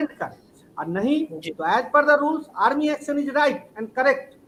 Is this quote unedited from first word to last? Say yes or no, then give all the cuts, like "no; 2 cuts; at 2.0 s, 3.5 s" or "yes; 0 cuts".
yes; 0 cuts